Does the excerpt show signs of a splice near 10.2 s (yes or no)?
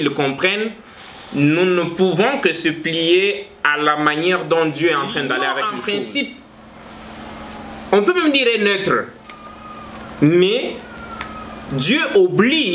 no